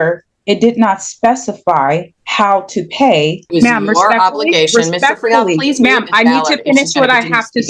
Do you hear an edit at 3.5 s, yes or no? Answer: yes